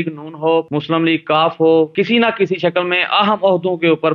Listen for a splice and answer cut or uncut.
cut